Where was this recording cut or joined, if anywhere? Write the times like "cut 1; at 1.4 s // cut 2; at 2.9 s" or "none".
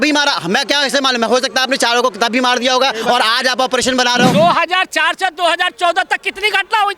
cut 1; at 4.3 s